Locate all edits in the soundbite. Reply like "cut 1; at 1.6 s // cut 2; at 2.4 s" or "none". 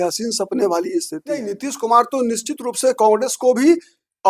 cut 1; at 1.5 s